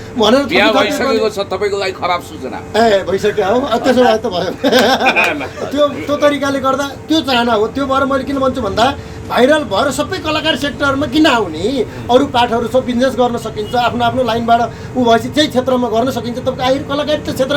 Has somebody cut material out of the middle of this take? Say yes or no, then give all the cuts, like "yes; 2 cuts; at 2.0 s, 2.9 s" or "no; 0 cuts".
no; 0 cuts